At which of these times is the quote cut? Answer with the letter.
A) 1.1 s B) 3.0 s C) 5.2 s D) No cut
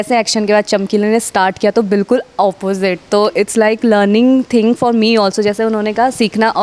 D